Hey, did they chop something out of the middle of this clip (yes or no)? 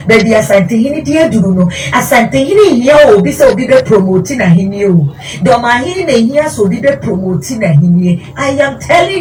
no